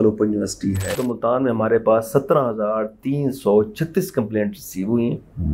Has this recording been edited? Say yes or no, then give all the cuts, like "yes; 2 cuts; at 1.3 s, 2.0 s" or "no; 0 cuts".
yes; 1 cut; at 1.0 s